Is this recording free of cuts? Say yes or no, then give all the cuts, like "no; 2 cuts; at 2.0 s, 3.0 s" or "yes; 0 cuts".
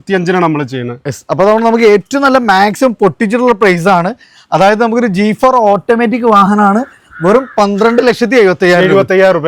yes; 0 cuts